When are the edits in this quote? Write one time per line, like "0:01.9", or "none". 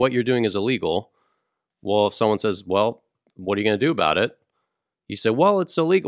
none